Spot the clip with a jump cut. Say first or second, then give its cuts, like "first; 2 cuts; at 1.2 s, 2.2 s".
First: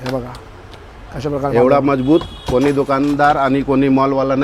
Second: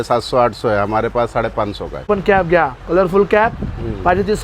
second; 1 cut; at 2.1 s